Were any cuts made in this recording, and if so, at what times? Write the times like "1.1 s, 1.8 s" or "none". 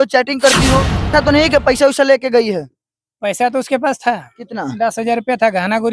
1.1 s

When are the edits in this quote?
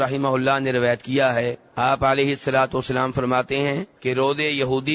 1.6 s, 3.9 s

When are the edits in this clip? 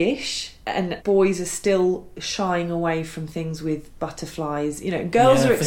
0.9 s

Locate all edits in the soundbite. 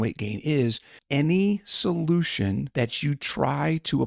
2.7 s

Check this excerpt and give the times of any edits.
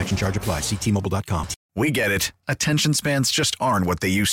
1.6 s

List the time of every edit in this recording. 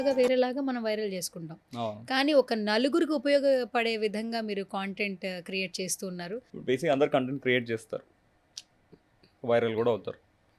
6.4 s

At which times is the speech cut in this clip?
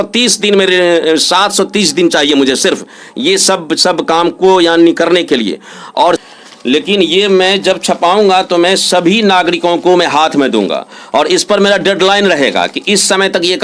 6.2 s

